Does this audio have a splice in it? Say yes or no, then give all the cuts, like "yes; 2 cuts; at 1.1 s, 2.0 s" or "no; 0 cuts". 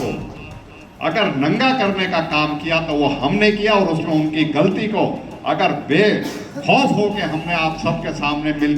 no; 0 cuts